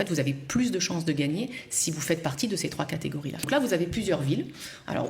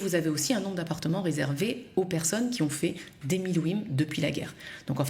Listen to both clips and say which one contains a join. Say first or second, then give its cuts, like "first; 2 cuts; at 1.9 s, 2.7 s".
first; 1 cut; at 3.5 s